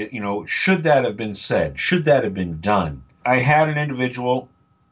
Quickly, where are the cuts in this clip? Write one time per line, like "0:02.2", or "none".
0:03.2